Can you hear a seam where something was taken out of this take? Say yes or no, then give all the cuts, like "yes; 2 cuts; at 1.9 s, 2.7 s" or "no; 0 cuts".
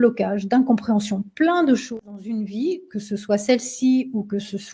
yes; 1 cut; at 1.9 s